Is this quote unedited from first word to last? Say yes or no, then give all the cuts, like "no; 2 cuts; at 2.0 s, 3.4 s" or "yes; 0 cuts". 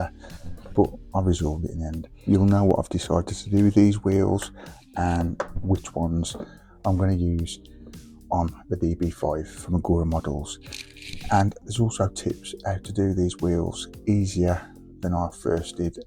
no; 1 cut; at 2.1 s